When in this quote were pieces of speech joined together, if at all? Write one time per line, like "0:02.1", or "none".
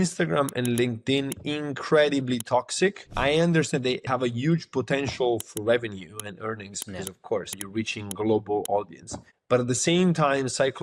0:03.1
0:04.1
0:07.6